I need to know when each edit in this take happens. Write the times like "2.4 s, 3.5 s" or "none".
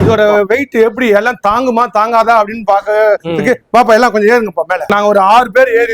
4.9 s